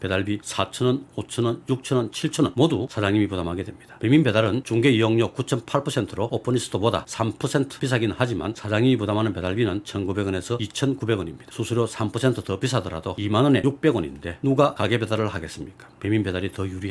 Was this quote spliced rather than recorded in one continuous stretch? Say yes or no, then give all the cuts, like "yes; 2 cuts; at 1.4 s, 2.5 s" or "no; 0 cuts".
no; 0 cuts